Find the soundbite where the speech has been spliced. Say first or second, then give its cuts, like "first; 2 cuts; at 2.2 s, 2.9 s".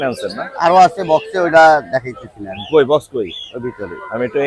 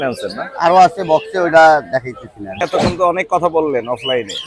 second; 1 cut; at 2.6 s